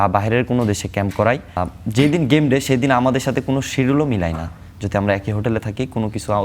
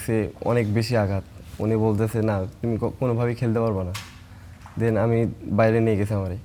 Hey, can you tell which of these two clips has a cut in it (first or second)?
first